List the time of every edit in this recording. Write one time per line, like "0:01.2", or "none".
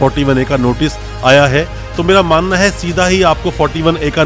none